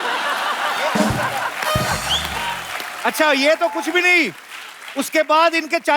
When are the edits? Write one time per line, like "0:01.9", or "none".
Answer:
none